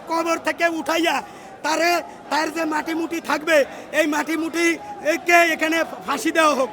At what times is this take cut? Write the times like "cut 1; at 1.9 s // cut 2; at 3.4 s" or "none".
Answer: none